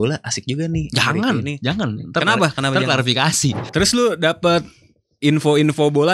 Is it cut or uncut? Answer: cut